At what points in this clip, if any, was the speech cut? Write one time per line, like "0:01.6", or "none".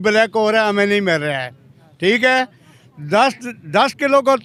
none